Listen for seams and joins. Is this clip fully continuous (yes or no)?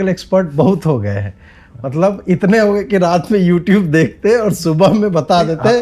yes